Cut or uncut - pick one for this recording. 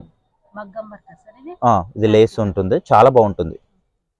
uncut